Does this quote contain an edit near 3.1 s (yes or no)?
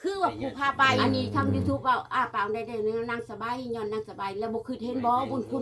no